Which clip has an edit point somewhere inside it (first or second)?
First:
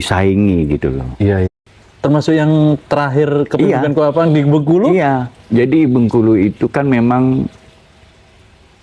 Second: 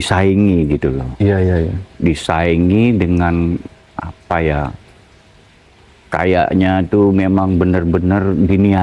first